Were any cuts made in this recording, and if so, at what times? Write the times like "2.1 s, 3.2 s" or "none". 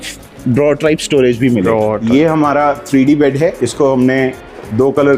2.0 s, 3.6 s